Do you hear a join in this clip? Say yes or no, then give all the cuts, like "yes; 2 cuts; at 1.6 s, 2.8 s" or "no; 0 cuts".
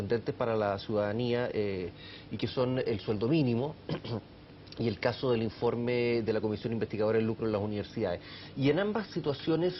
no; 0 cuts